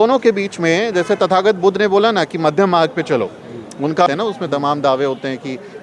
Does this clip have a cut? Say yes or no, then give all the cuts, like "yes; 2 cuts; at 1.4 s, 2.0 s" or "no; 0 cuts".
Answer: yes; 1 cut; at 4.1 s